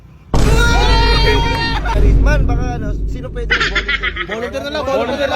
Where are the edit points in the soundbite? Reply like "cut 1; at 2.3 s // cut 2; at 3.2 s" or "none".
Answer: cut 1; at 1.9 s